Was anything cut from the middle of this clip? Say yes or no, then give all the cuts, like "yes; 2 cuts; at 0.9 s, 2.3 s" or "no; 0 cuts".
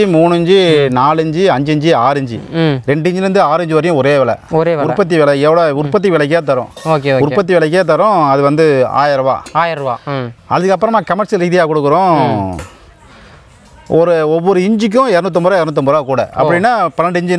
no; 0 cuts